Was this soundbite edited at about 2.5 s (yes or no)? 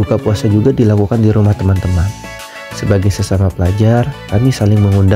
no